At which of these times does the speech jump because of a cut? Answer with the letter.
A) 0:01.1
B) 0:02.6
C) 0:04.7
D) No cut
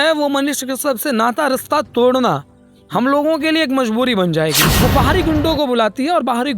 C